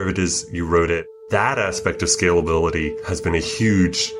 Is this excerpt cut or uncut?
cut